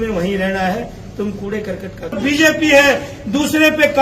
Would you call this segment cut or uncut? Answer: cut